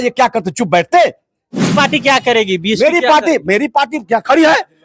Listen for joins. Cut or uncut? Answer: cut